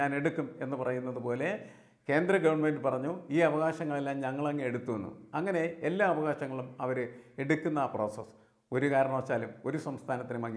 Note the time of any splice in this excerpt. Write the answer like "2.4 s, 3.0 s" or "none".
none